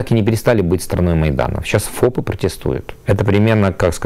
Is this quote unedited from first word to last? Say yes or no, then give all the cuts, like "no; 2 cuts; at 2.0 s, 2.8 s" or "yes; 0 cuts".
no; 1 cut; at 2.9 s